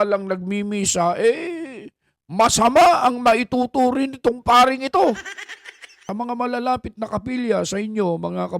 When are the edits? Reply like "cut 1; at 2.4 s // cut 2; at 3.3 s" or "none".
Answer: cut 1; at 6.1 s